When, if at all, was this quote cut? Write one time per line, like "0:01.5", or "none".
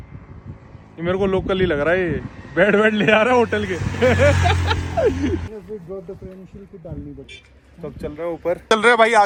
none